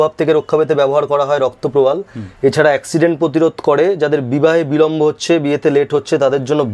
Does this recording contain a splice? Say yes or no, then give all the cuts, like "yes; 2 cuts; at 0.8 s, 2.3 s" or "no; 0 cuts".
no; 0 cuts